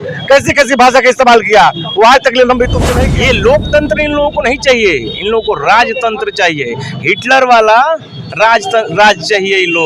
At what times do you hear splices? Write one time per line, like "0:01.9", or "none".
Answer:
0:02.8